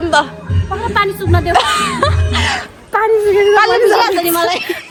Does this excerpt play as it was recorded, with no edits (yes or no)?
yes